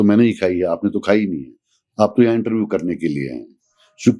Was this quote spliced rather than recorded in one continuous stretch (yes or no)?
no